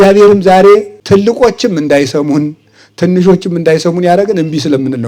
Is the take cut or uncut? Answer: cut